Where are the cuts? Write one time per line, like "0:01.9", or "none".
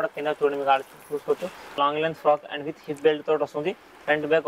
0:01.7